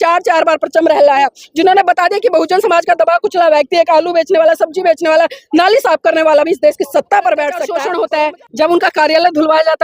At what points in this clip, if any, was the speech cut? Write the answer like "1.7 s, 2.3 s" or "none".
7.8 s